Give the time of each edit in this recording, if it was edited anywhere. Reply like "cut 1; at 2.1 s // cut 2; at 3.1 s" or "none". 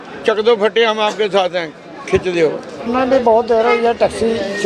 cut 1; at 2.9 s